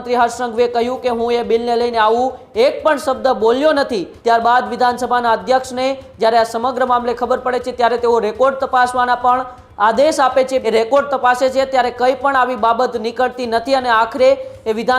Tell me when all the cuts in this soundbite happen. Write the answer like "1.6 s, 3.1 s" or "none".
4.1 s, 10.6 s